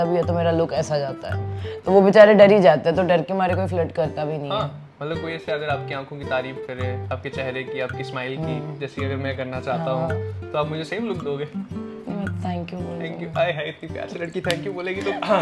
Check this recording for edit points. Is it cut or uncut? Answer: uncut